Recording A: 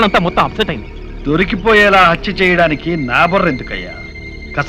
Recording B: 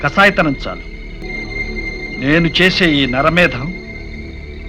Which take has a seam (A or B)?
B